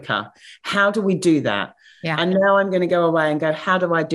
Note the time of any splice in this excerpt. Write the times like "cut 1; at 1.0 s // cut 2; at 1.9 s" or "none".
none